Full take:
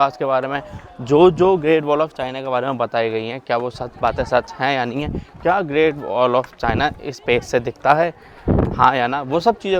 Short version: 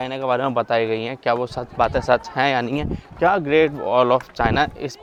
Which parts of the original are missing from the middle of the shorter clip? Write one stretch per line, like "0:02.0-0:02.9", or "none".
none